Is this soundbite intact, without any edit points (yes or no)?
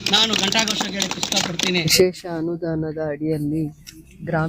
no